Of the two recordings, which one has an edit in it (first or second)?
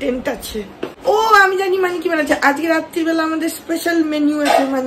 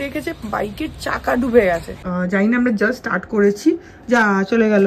second